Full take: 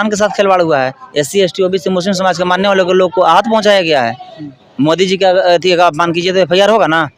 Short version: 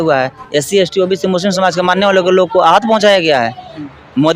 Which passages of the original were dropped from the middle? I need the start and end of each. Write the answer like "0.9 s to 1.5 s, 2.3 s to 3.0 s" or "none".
none